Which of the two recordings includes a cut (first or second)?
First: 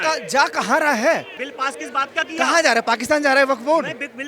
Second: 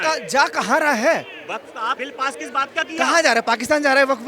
first